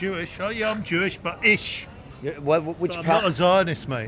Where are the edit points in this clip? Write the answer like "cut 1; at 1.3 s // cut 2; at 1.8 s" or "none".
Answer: none